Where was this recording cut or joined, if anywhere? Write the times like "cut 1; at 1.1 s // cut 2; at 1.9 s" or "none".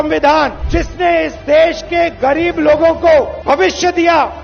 none